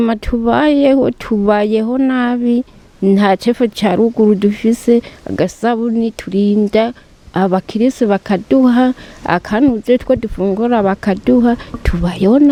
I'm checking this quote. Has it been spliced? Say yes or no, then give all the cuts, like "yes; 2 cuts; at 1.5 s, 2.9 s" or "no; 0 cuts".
no; 0 cuts